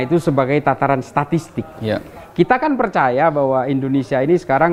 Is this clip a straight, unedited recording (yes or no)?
yes